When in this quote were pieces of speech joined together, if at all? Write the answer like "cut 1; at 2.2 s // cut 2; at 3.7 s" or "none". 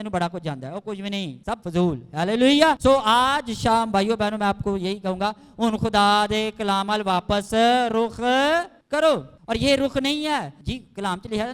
cut 1; at 1.5 s // cut 2; at 2.8 s // cut 3; at 8.8 s // cut 4; at 9.3 s // cut 5; at 10.6 s